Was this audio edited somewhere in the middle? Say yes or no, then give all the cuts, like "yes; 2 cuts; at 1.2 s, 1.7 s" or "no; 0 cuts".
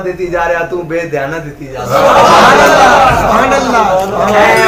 no; 0 cuts